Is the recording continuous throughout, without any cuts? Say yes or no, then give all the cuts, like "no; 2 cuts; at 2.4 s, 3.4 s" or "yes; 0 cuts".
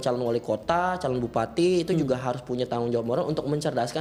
yes; 0 cuts